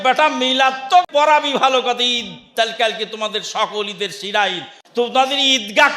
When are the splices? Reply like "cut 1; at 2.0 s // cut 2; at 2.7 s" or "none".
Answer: cut 1; at 1.1 s